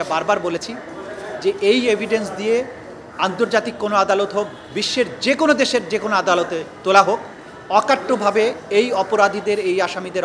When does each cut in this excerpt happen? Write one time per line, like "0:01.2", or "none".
none

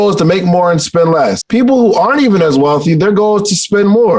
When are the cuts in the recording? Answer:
0:01.4

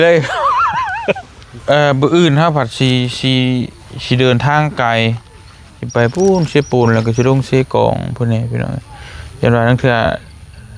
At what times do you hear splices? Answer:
0:01.6

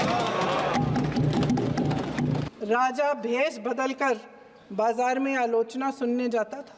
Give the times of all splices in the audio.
0:02.5

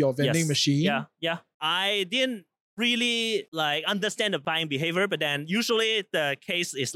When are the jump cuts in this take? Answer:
0:01.5

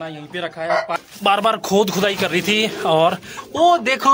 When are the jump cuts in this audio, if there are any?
0:00.9

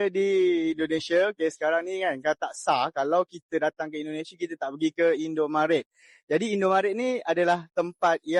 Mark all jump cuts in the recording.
none

